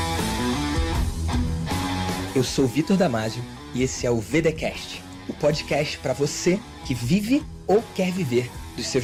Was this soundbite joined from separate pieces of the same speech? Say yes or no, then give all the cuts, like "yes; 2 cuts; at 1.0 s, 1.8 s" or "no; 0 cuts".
no; 0 cuts